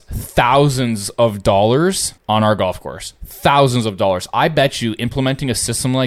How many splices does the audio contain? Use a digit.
1